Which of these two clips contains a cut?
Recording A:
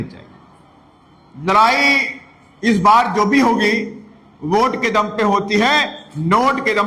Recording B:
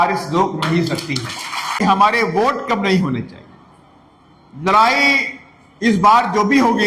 B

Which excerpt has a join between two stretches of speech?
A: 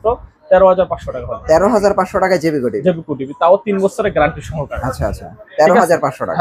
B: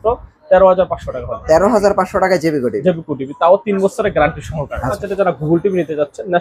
B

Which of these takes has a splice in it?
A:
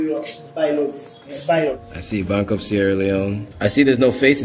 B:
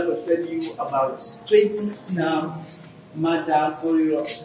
A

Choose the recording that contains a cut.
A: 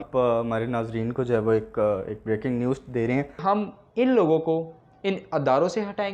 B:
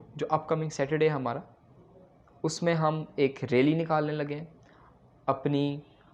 A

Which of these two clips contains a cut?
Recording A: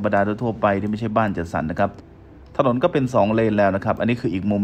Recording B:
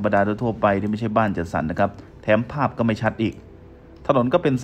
A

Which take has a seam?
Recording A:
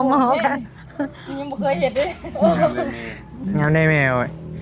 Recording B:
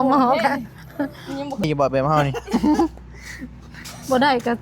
B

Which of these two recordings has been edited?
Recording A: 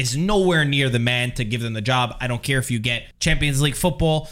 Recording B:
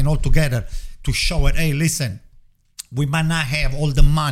A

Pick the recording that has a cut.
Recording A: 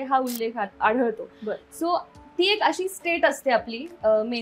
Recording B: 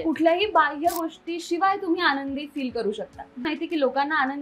B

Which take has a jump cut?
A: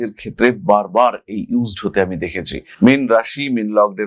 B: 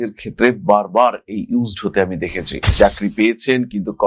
B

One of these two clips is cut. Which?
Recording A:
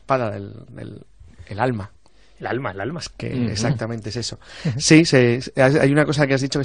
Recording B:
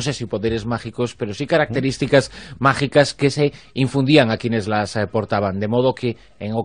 B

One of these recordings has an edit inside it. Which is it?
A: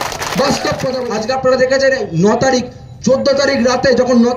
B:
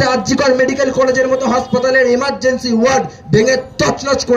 A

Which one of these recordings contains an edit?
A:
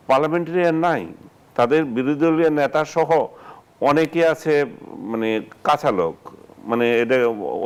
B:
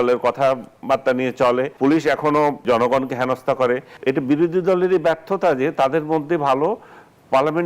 B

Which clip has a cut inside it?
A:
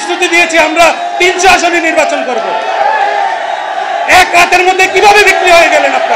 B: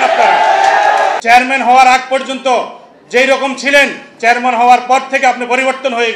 B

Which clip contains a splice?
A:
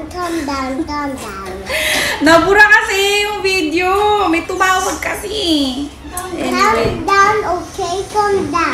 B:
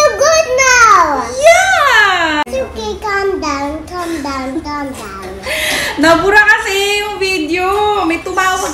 B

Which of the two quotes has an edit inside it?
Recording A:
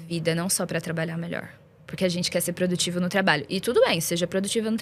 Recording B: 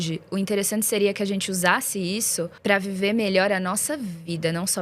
B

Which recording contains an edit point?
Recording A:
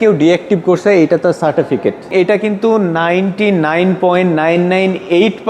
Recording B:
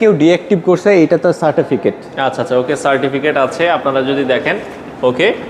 A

